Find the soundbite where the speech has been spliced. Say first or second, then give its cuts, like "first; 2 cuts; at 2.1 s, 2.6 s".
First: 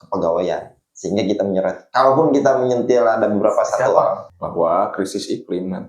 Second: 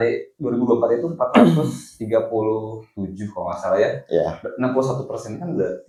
first; 1 cut; at 4.3 s